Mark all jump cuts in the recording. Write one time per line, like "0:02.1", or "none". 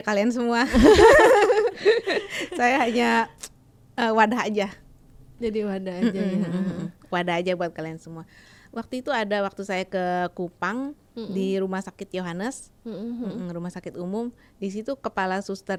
none